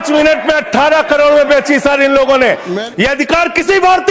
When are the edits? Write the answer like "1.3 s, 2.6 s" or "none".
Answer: 2.7 s